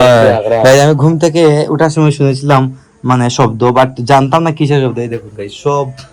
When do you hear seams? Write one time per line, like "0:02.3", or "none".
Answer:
none